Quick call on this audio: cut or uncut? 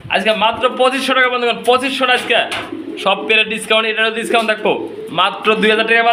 uncut